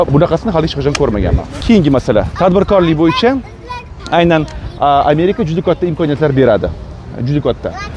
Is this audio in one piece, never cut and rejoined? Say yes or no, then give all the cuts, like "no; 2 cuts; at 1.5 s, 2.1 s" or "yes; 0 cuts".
yes; 0 cuts